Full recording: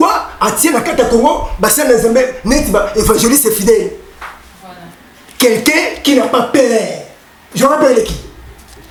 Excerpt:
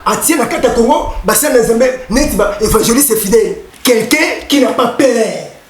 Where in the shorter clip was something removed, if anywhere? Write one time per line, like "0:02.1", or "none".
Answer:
0:03.7